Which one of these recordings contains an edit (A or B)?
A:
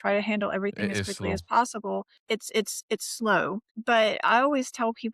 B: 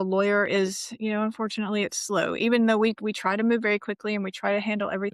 A